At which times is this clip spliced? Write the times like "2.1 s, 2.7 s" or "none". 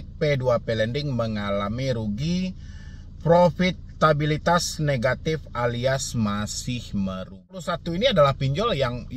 7.7 s